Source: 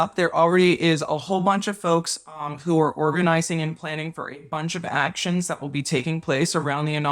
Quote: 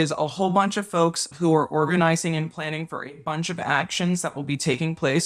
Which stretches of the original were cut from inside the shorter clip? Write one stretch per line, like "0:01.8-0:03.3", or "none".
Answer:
0:02.2-0:02.5